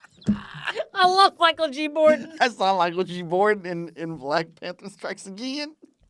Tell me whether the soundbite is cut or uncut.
uncut